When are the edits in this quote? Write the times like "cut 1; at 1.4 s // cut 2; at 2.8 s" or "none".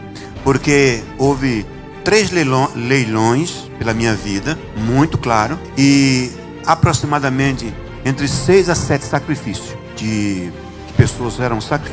none